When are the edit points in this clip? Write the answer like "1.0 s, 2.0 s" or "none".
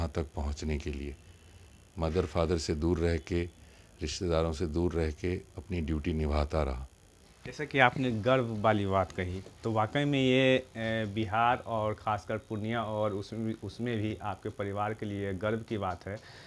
none